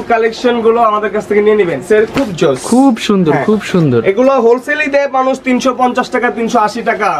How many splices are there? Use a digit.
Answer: 1